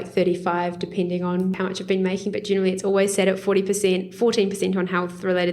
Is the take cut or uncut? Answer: cut